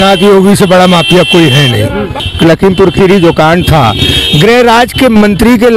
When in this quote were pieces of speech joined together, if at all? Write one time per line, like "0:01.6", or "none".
0:02.2